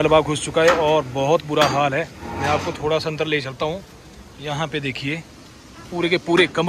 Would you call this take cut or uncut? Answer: uncut